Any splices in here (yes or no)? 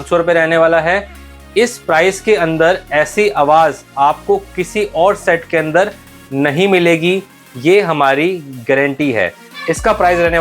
yes